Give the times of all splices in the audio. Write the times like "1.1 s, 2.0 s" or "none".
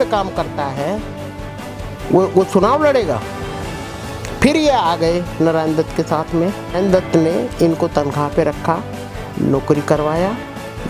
6.7 s